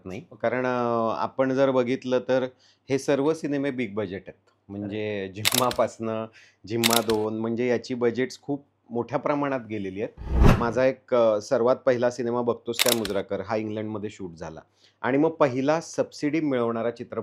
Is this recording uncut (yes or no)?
no